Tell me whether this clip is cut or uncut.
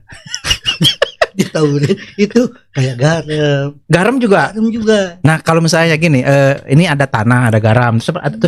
uncut